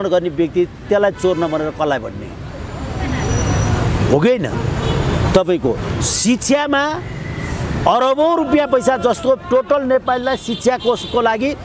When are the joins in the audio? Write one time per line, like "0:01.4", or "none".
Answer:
none